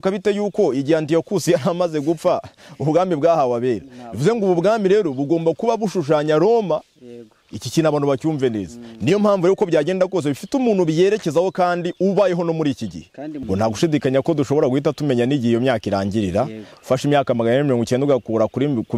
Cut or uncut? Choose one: cut